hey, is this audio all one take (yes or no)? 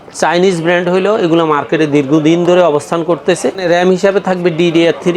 no